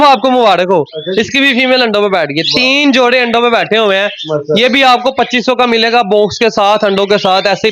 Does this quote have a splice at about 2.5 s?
no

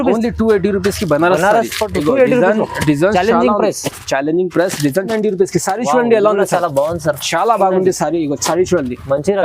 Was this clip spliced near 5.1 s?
yes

